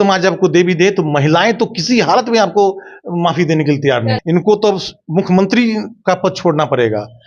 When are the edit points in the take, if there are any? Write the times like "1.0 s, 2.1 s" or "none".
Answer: 4.2 s